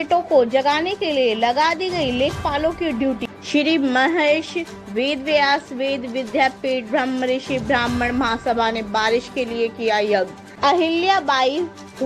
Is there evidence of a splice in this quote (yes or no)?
yes